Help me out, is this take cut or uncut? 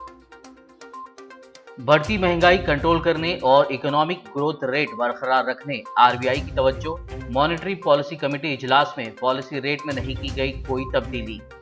uncut